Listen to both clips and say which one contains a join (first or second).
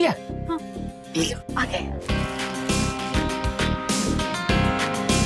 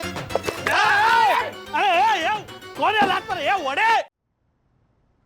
second